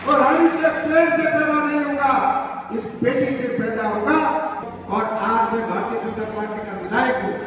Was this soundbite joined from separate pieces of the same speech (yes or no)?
yes